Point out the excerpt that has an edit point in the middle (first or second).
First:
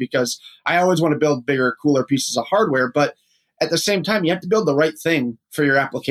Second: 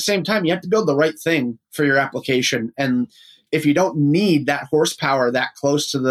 second